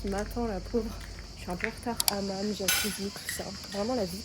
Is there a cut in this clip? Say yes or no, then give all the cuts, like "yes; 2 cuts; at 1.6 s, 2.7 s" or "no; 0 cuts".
yes; 1 cut; at 2.0 s